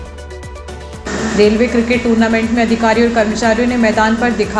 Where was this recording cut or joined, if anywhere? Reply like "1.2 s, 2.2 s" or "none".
0.9 s